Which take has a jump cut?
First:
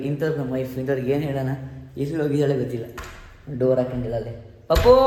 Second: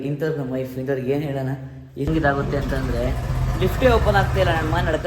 second; 1 cut; at 2.1 s

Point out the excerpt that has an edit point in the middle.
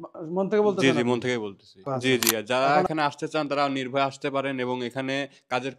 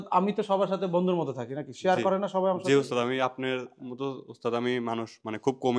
first; 1 cut; at 1.9 s

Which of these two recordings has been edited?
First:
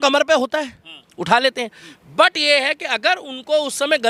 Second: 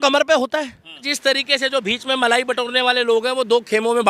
second; 1 cut; at 1.1 s

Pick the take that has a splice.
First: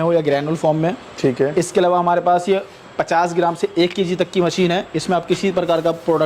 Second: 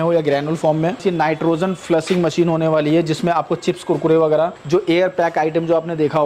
second; 2 cuts; at 1.0 s, 4.6 s

